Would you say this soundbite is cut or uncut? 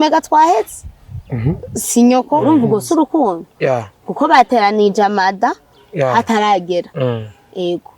cut